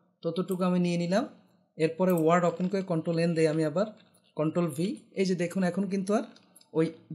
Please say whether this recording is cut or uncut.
uncut